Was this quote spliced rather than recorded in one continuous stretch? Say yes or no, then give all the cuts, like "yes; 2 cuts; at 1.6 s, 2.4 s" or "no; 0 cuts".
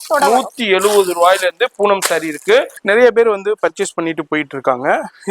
yes; 1 cut; at 2.8 s